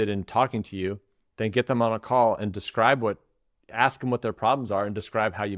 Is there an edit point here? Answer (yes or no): no